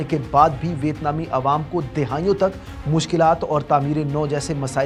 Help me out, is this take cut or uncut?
uncut